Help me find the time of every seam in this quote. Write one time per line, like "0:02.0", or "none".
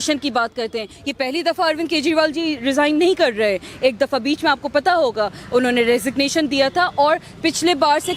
0:00.9